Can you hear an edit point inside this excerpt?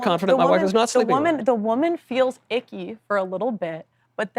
no; 0 cuts

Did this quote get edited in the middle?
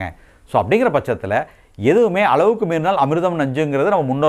no; 0 cuts

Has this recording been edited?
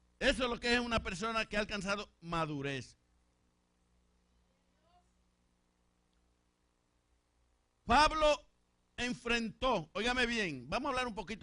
yes; 1 cut; at 2.1 s

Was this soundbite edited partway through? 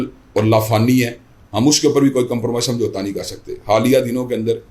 no; 0 cuts

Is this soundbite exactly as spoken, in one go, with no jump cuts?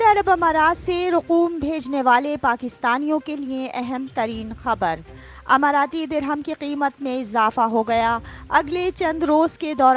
yes; 0 cuts

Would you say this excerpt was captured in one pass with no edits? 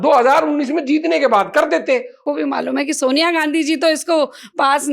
no; 1 cut; at 2.2 s

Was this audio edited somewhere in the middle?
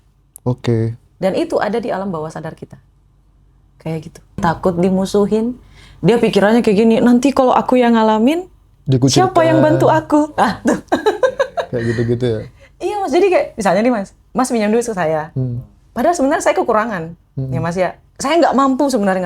yes; 1 cut; at 4.6 s

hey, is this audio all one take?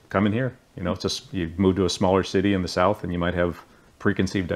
yes; 0 cuts

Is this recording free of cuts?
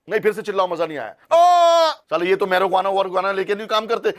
no; 1 cut; at 2.0 s

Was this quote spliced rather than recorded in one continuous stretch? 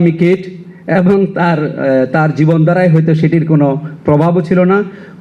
no; 0 cuts

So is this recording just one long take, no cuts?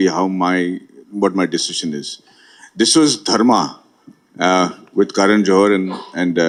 yes; 0 cuts

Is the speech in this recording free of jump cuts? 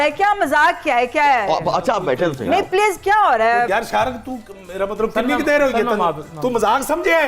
no; 1 cut; at 3.7 s

